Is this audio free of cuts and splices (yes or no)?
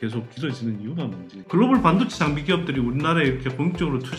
no